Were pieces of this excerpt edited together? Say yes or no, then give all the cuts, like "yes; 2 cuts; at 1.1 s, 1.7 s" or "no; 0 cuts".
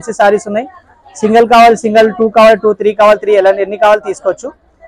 no; 0 cuts